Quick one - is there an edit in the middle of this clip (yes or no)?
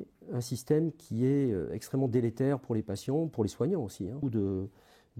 yes